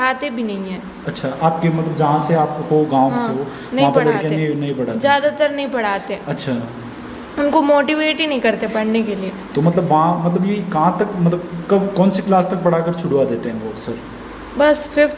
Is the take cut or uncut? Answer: uncut